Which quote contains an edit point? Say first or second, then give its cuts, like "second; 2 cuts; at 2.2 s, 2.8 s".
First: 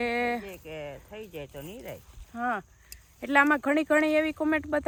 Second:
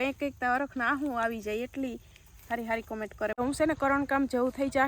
second; 1 cut; at 3.4 s